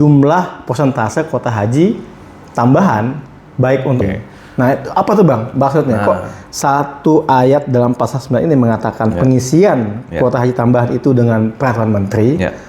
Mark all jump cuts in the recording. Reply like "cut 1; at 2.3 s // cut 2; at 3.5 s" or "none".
cut 1; at 4.0 s